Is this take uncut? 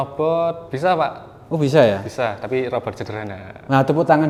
yes; 0 cuts

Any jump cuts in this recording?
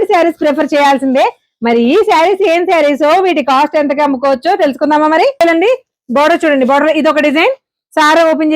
yes; 1 cut; at 5.4 s

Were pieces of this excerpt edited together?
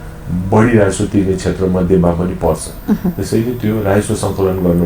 no; 0 cuts

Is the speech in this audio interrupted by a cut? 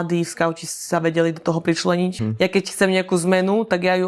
yes; 1 cut; at 2.2 s

